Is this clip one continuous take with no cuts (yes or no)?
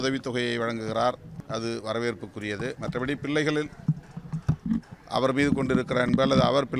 no